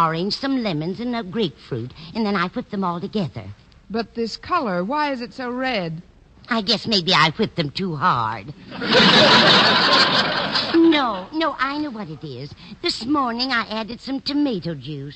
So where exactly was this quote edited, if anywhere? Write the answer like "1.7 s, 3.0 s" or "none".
7.7 s